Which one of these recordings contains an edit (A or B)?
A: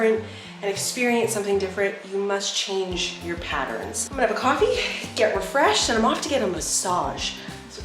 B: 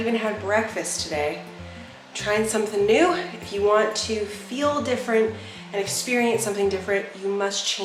A